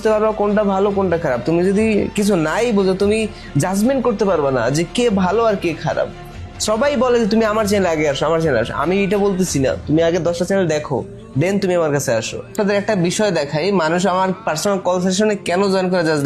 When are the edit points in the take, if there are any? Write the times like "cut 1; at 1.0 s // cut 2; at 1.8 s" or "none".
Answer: cut 1; at 12.5 s